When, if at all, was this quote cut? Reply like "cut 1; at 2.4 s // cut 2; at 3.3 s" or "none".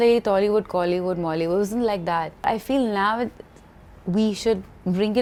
none